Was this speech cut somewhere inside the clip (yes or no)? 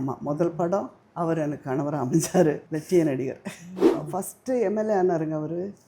yes